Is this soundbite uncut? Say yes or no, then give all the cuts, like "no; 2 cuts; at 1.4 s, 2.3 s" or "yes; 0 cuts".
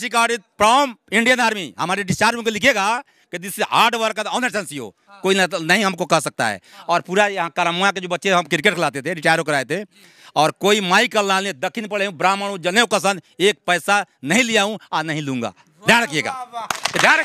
yes; 0 cuts